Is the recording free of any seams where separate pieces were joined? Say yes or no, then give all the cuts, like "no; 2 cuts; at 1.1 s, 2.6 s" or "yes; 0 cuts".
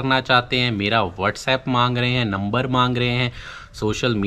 yes; 0 cuts